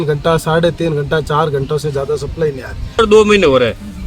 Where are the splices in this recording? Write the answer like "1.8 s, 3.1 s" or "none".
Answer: 3.0 s